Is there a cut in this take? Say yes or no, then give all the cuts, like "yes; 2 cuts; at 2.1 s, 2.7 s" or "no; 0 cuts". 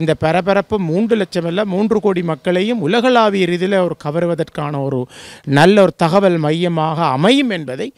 no; 0 cuts